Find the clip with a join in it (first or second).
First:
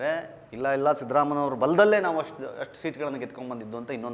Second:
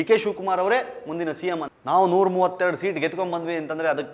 second